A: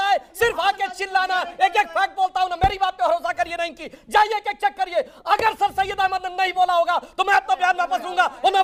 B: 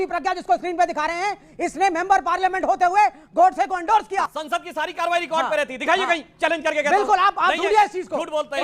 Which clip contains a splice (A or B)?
B